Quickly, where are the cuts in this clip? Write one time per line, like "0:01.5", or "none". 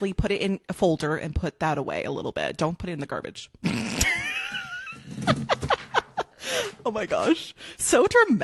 none